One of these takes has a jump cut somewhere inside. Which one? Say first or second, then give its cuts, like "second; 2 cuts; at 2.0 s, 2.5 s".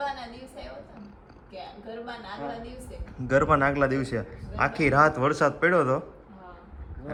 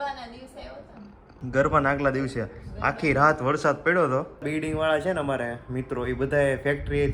second; 2 cuts; at 1.3 s, 4.4 s